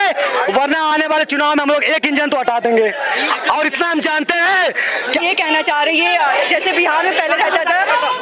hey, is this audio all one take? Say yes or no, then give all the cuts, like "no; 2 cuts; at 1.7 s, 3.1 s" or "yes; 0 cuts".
yes; 0 cuts